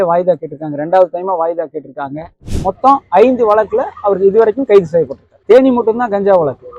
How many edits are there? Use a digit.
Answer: 1